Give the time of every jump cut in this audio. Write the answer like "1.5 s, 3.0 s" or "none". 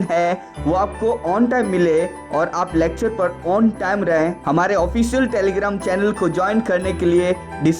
4.1 s